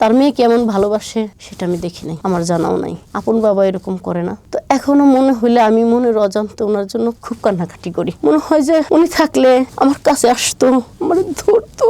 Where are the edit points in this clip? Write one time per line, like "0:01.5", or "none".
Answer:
none